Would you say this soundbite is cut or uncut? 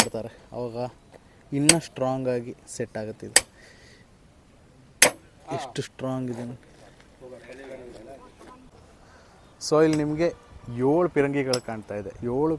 uncut